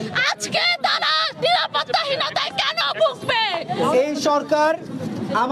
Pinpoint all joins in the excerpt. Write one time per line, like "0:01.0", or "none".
0:03.8